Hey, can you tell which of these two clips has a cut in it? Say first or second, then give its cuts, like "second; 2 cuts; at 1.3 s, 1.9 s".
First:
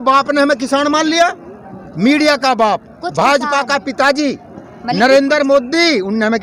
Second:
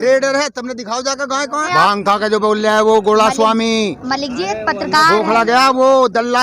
second; 1 cut; at 1.6 s